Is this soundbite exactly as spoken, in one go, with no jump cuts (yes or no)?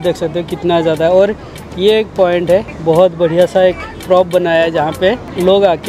no